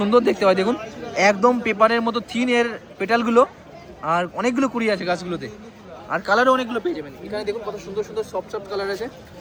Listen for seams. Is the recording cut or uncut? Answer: uncut